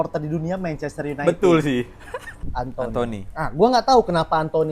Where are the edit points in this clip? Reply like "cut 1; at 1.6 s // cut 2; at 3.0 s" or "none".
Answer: cut 1; at 2.4 s